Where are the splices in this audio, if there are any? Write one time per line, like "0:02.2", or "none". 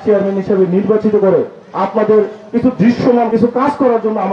0:03.3